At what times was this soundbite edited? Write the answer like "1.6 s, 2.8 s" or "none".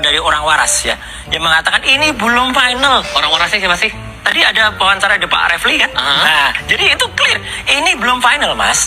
none